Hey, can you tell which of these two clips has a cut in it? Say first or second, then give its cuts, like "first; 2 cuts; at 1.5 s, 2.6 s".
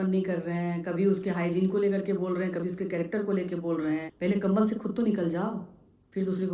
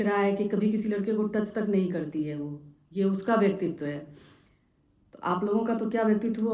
first; 1 cut; at 4.1 s